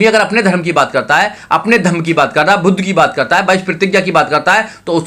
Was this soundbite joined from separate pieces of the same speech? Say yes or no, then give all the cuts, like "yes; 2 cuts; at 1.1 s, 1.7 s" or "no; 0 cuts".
no; 0 cuts